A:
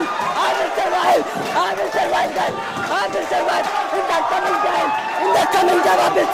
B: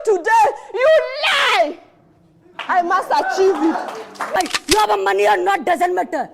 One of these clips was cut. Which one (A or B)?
B